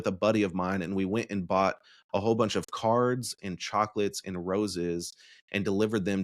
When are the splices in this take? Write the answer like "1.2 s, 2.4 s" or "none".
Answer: none